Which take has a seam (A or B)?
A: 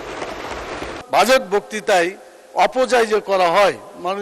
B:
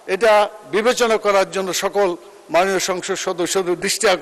A